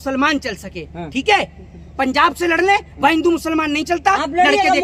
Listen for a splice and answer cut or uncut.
uncut